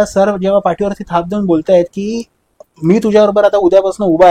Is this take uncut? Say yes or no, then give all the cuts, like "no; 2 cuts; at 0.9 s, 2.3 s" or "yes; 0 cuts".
yes; 0 cuts